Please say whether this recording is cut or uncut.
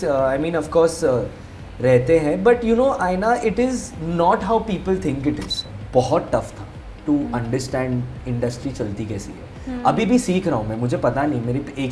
cut